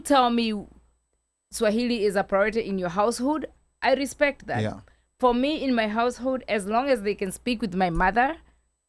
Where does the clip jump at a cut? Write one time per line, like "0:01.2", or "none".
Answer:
none